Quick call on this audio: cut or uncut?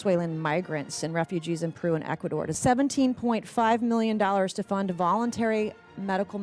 cut